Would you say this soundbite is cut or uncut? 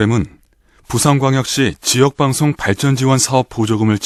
uncut